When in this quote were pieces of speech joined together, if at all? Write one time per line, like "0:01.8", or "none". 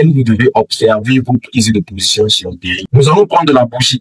0:02.9